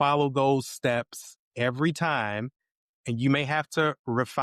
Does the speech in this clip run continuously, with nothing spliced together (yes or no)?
yes